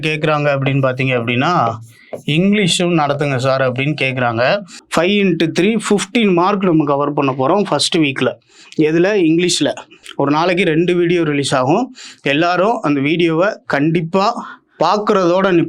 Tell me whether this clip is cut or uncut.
cut